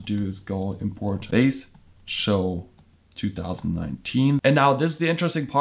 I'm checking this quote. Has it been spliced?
yes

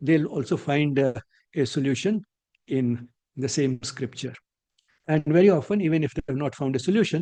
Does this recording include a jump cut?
no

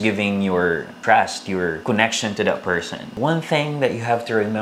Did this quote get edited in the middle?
yes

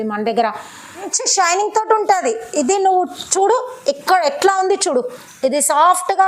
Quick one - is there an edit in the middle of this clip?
yes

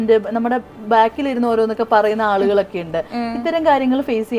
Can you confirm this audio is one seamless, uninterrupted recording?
yes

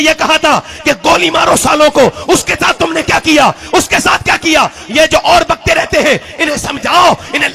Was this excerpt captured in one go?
yes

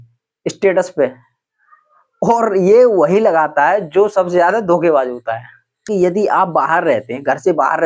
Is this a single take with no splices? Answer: no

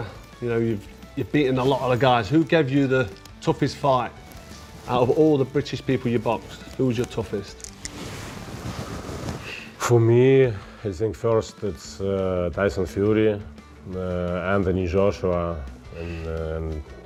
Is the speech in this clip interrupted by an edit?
no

